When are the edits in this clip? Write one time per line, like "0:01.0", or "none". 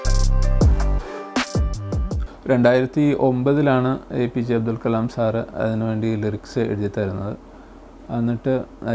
0:02.1